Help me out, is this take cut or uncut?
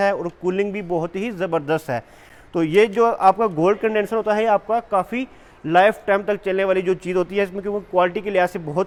uncut